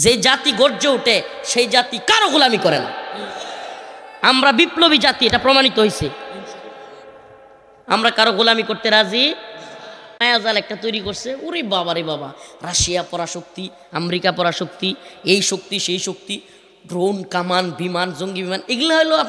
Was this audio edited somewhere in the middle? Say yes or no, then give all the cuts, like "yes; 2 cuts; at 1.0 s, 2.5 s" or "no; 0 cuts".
yes; 1 cut; at 10.2 s